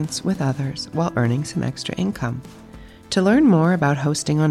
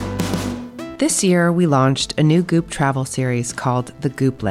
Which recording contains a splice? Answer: second; 1 cut; at 0.9 s

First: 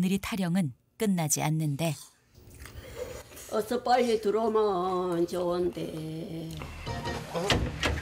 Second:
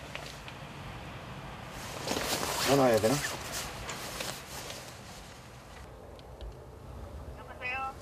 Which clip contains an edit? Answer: first; 1 cut; at 6.8 s

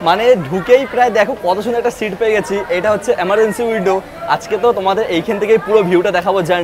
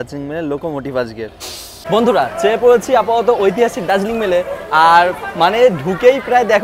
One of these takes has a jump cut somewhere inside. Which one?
second; 1 cut; at 1.8 s

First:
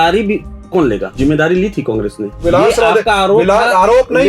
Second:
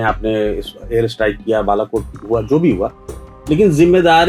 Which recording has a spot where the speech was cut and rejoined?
first; 2 cuts; at 1.1 s, 2.4 s

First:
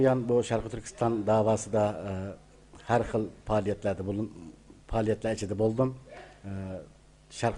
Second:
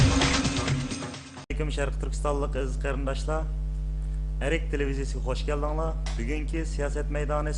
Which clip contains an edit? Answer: first; 1 cut; at 2.1 s

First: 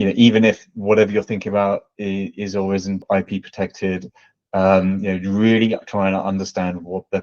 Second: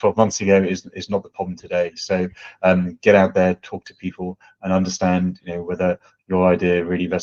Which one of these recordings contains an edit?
first; 1 cut; at 3.0 s

